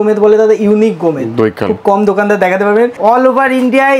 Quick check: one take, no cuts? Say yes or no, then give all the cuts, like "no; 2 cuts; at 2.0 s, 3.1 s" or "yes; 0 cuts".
no; 1 cut; at 3.0 s